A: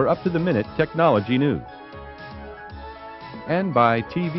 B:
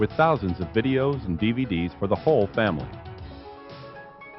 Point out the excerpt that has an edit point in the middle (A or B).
B